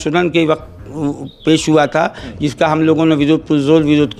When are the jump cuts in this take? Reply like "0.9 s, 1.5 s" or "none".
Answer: none

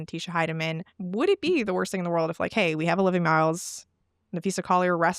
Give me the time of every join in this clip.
0.9 s

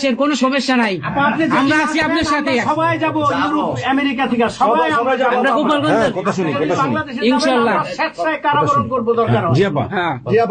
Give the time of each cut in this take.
none

